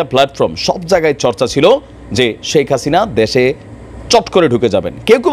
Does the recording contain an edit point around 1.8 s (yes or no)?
no